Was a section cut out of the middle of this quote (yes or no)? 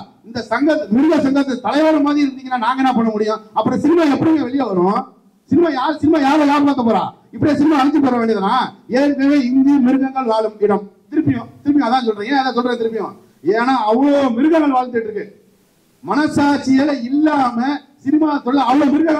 no